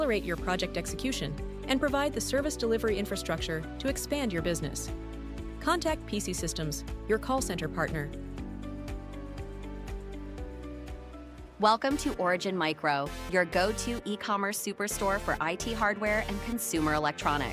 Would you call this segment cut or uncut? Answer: cut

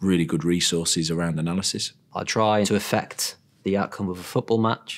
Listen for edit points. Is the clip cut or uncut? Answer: cut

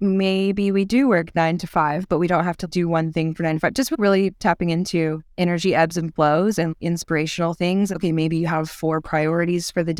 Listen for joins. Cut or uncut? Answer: cut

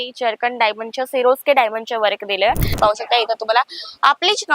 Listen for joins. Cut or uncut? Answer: cut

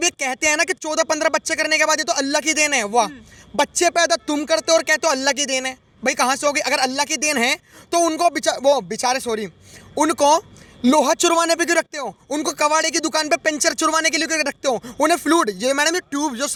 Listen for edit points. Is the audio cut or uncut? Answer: uncut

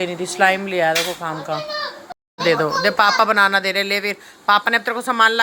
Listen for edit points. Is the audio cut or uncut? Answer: cut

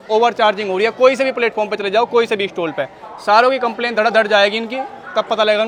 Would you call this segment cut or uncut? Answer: uncut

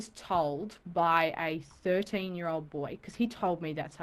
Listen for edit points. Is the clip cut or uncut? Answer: uncut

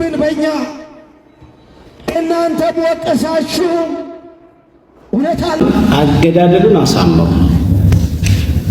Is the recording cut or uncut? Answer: cut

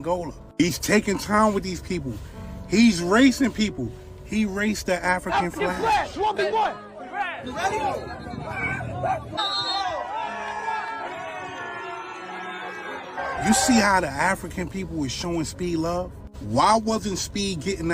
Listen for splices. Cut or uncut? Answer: uncut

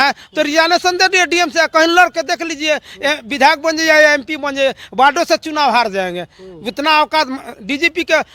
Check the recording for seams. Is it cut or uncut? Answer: uncut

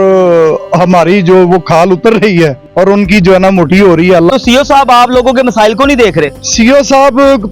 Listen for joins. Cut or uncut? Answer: cut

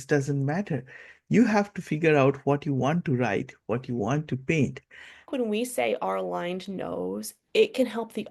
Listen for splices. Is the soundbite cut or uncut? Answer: cut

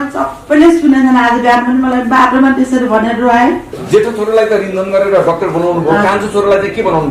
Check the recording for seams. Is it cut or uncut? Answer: cut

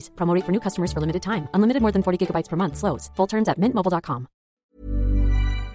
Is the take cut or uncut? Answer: cut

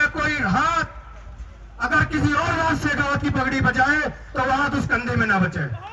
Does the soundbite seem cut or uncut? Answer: uncut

